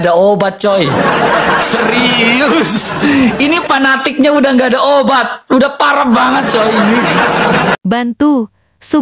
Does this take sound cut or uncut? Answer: cut